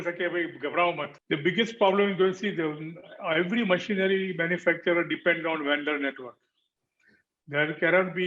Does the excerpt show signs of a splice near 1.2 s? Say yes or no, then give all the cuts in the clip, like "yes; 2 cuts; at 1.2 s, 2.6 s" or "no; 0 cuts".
yes; 1 cut; at 1.2 s